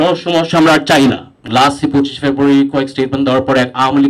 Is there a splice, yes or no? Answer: yes